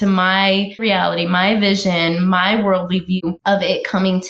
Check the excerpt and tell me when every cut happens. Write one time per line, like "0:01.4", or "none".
0:00.8
0:03.3